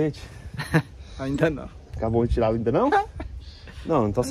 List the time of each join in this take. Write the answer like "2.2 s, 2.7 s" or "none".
none